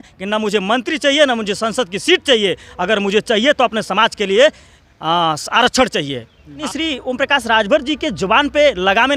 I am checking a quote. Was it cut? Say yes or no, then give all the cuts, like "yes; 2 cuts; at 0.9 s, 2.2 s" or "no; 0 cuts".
yes; 1 cut; at 6.6 s